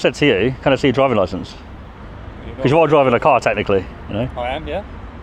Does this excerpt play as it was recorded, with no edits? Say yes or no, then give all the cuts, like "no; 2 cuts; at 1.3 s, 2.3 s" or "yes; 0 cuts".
yes; 0 cuts